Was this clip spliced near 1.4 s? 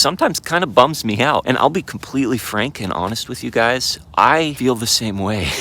yes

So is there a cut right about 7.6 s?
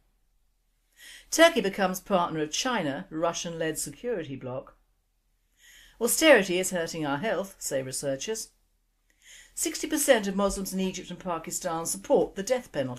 no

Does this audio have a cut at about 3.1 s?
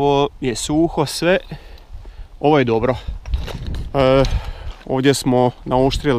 no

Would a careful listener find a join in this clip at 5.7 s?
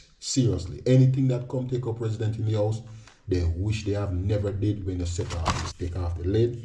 yes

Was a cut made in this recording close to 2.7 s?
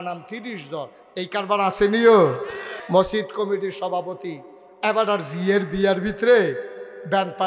yes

